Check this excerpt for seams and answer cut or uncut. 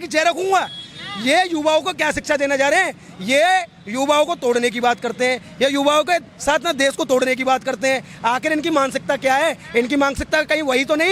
uncut